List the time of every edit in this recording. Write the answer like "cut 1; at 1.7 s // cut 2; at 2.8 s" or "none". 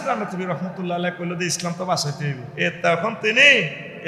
cut 1; at 2.5 s

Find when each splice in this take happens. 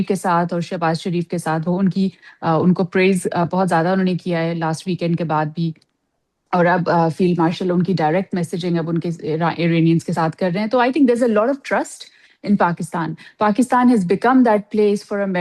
none

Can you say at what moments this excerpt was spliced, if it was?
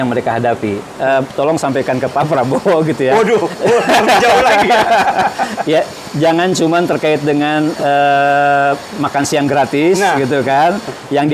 cut 1; at 0.9 s

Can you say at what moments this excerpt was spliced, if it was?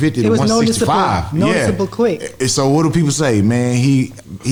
none

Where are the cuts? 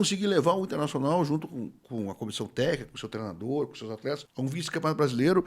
cut 1; at 1.8 s // cut 2; at 4.3 s

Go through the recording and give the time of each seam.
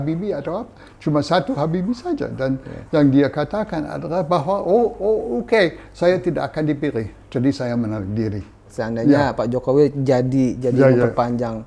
cut 1; at 8.7 s

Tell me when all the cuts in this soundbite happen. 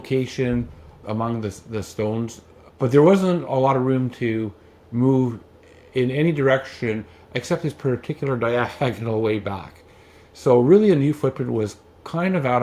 cut 1; at 2.5 s

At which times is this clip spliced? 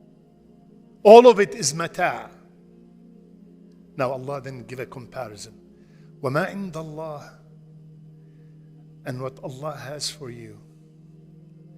cut 1; at 7.3 s // cut 2; at 9.0 s

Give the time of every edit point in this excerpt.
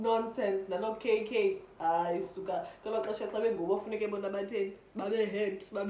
none

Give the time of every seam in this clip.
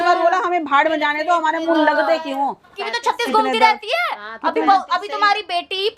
cut 1; at 2.7 s

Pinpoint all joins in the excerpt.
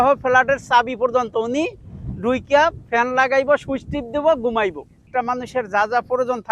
cut 1; at 5.1 s

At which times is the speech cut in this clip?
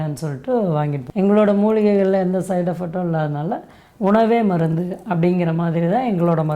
cut 1; at 1.0 s

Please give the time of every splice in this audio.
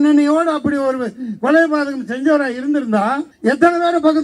cut 1; at 3.3 s

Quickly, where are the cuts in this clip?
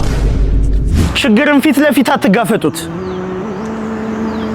cut 1; at 1.0 s

